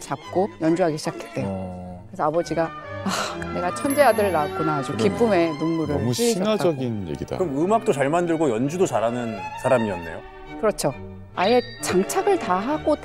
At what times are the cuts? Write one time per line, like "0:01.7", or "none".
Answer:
none